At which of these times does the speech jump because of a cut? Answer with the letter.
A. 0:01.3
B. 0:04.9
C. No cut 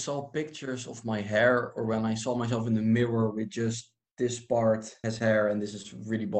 B